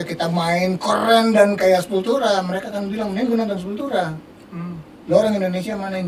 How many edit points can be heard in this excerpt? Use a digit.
0